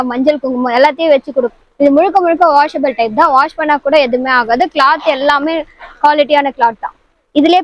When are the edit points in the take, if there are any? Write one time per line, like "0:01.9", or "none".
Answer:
0:01.5